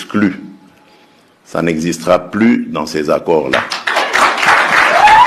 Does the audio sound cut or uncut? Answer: uncut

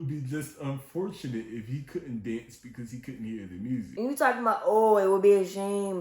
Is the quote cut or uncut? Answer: cut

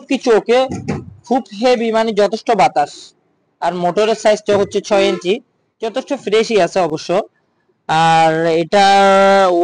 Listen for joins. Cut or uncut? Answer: uncut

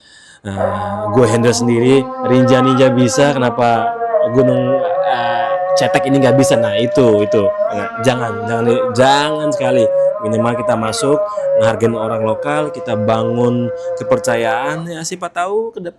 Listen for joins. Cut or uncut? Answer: uncut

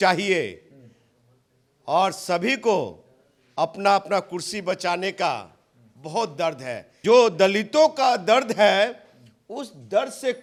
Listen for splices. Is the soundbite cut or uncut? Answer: uncut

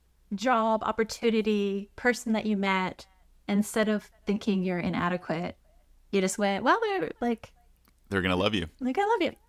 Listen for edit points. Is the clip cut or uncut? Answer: uncut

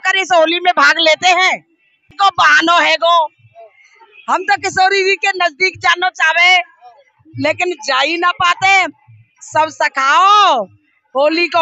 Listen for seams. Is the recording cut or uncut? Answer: cut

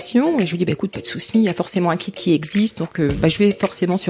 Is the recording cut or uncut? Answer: uncut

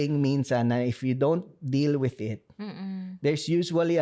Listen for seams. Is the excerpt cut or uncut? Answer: uncut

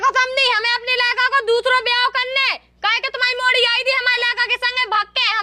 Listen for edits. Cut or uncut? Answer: uncut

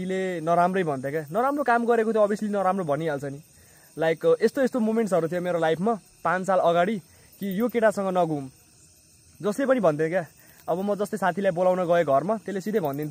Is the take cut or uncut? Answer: uncut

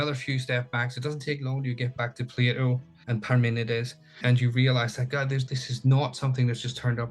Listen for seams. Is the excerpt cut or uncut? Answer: cut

